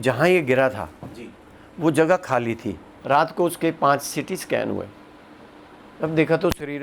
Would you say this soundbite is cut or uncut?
cut